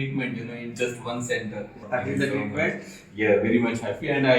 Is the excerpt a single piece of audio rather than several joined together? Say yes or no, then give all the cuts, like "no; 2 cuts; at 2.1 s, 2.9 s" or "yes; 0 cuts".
no; 1 cut; at 1.8 s